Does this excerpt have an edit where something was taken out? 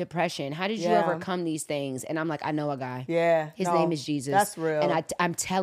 no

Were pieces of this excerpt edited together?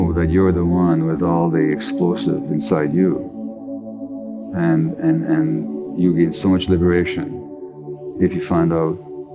no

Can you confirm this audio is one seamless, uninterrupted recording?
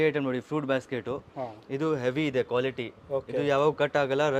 yes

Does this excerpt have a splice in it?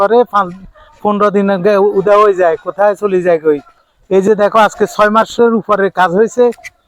no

